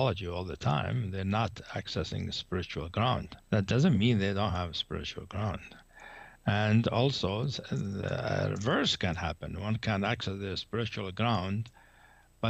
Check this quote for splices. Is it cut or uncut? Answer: cut